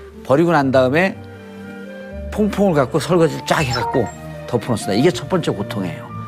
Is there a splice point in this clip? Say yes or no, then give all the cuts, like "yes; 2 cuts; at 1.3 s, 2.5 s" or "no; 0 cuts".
yes; 1 cut; at 4.6 s